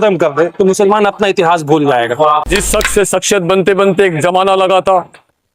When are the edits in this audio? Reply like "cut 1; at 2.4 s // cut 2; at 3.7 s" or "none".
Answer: cut 1; at 2.5 s